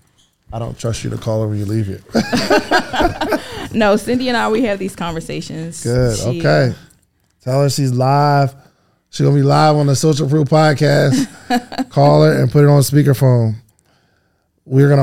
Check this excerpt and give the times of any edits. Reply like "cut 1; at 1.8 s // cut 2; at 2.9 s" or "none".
none